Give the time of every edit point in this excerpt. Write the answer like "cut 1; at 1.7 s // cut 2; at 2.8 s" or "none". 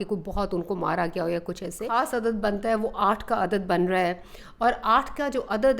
cut 1; at 1.8 s